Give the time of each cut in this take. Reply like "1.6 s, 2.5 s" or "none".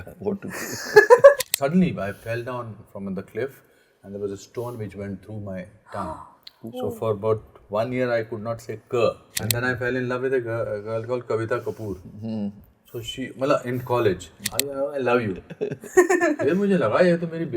1.5 s, 9.3 s, 14.5 s

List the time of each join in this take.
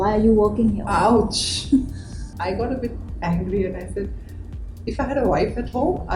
2.3 s

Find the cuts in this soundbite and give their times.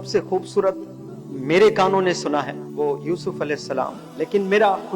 2.6 s, 4.0 s

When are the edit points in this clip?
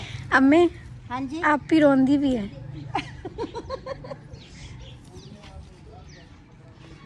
none

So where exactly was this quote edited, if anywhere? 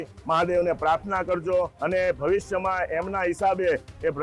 1.8 s

